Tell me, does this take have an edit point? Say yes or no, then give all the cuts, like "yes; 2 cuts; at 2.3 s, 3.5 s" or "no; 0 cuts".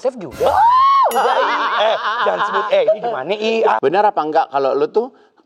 yes; 1 cut; at 3.8 s